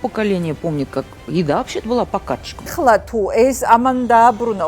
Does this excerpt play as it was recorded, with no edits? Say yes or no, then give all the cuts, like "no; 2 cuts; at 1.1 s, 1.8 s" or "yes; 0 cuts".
no; 1 cut; at 2.7 s